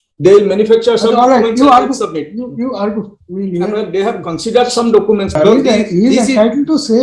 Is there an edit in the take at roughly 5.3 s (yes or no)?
yes